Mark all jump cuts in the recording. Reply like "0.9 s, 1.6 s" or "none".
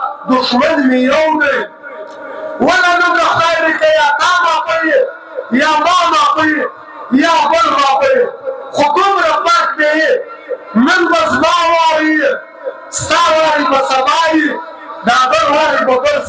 none